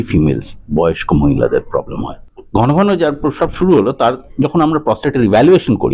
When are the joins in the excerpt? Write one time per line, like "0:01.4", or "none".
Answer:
0:02.3